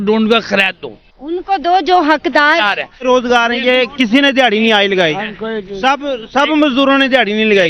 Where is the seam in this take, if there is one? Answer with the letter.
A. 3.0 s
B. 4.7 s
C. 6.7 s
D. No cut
A